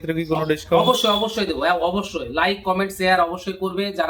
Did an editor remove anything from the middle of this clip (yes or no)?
no